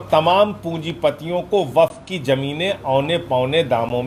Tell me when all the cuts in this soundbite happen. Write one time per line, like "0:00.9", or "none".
none